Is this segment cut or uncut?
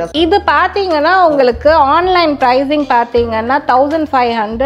uncut